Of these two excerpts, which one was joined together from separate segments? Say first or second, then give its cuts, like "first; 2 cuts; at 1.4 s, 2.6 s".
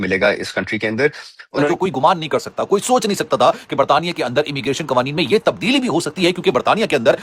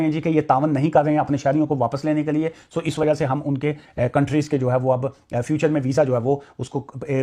first; 1 cut; at 1.7 s